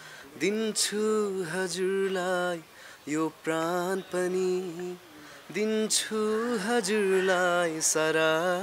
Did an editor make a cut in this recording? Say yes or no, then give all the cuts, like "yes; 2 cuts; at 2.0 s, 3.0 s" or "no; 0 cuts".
no; 0 cuts